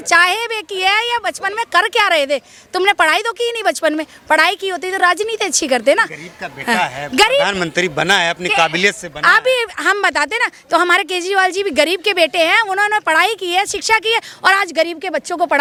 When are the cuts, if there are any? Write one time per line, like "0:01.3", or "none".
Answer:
none